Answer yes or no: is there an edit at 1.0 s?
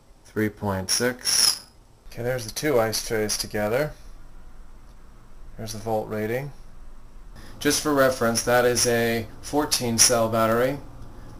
yes